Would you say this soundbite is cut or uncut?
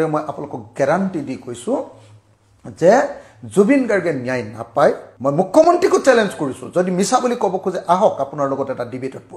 cut